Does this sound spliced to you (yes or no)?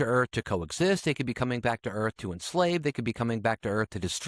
no